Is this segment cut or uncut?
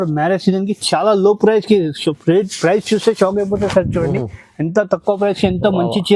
uncut